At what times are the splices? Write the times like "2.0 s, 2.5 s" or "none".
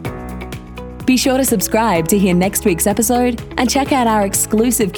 0.9 s